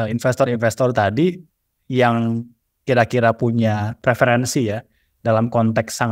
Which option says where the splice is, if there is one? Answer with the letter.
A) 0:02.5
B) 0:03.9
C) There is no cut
B